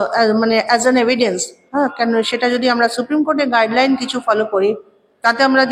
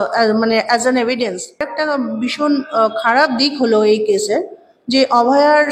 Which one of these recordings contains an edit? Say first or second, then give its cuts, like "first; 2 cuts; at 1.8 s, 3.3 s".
second; 1 cut; at 1.7 s